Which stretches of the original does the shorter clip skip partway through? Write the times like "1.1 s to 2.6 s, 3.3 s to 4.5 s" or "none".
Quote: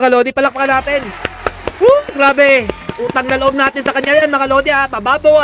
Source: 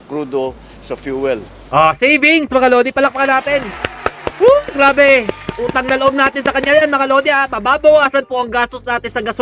none